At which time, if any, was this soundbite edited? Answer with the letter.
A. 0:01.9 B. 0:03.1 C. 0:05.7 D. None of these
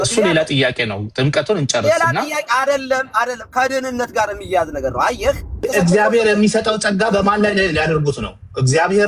C